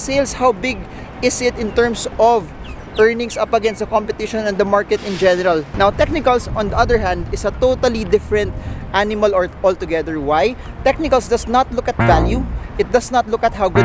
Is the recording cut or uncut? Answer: cut